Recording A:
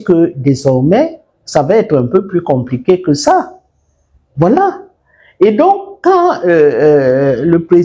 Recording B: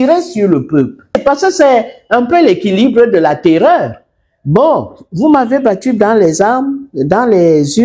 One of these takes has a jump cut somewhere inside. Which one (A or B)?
B